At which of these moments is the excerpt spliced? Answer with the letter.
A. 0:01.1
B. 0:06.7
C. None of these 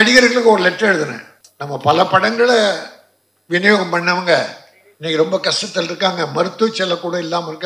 C